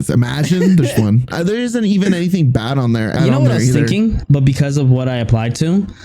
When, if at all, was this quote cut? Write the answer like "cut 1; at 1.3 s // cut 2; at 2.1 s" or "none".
cut 1; at 1.3 s // cut 2; at 3.2 s // cut 3; at 4.2 s